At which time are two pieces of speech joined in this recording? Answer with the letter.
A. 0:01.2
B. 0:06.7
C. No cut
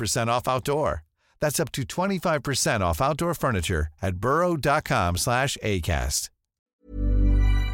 B